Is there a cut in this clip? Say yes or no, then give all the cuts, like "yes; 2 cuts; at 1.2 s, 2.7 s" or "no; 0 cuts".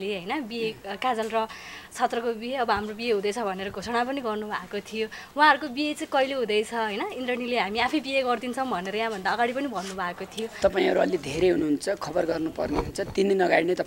yes; 1 cut; at 10.6 s